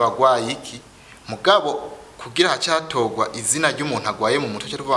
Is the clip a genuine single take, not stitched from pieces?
yes; 0 cuts

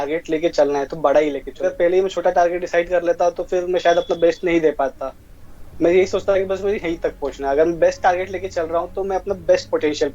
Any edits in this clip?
yes; 1 cut; at 1.7 s

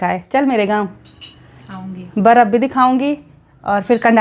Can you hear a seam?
no; 0 cuts

